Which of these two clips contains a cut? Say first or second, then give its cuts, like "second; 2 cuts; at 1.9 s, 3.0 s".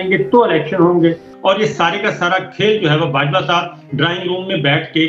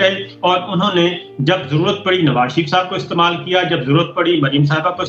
first; 1 cut; at 1.3 s